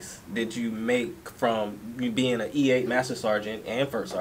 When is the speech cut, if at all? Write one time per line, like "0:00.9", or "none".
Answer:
none